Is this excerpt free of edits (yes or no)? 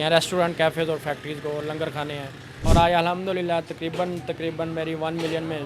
no